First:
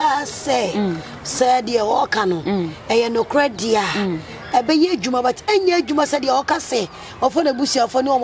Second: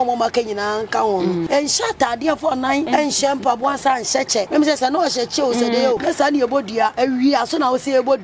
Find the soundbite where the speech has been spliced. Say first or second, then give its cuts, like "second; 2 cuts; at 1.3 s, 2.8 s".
second; 5 cuts; at 1.4 s, 2.9 s, 4.5 s, 6.0 s, 6.9 s